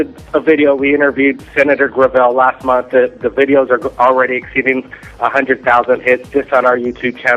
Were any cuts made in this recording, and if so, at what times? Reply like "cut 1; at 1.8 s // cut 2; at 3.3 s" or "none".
cut 1; at 2.0 s

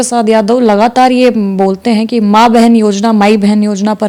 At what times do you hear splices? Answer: none

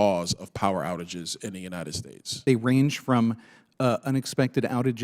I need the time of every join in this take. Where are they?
cut 1; at 2.4 s

